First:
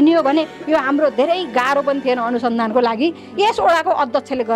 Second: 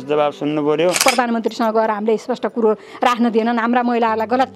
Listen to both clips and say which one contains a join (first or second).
second